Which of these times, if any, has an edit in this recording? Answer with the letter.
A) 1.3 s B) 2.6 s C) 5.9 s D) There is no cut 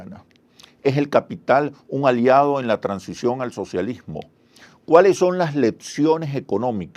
B